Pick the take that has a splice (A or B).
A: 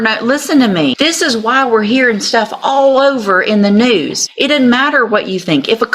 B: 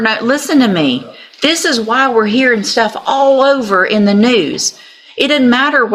A